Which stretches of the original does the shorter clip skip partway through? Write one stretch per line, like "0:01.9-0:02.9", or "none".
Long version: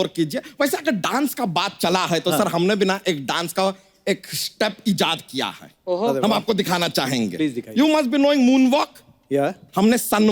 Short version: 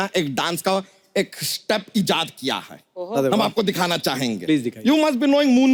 none